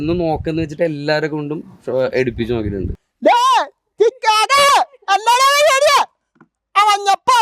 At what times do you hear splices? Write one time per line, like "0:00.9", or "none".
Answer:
0:02.9